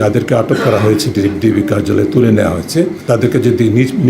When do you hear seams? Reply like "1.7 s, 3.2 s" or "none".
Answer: 3.0 s